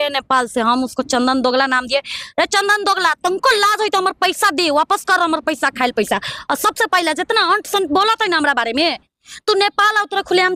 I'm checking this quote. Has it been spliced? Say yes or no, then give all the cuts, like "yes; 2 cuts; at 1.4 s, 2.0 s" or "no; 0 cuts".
no; 0 cuts